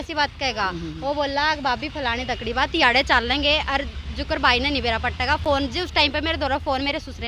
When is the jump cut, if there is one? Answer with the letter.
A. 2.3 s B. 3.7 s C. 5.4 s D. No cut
D